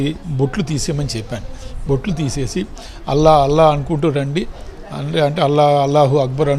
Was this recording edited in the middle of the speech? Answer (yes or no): no